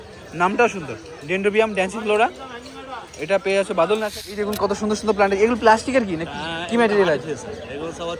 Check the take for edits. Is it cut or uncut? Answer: cut